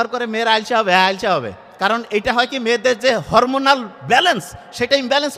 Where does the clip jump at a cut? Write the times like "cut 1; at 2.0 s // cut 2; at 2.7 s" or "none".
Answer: none